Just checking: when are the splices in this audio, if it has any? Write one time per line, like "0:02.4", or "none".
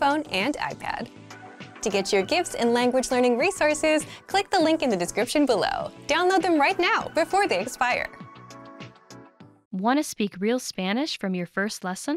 0:09.5